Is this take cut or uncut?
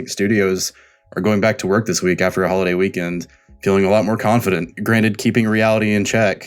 cut